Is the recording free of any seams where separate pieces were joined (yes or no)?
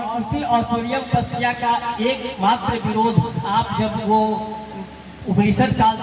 yes